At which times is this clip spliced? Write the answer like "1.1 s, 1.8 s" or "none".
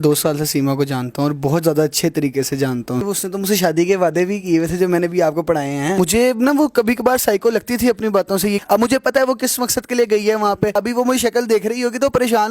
3.1 s, 6.0 s, 8.6 s, 10.7 s